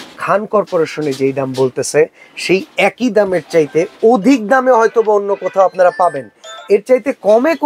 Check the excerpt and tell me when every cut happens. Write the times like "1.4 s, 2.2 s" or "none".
none